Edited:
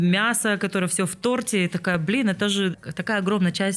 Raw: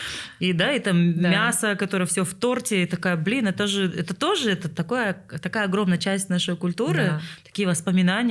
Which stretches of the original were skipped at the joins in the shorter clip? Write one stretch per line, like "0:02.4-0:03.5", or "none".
0:04.0-0:05.2